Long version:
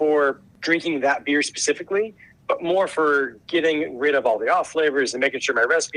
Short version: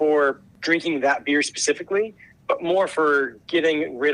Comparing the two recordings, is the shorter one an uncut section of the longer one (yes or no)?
yes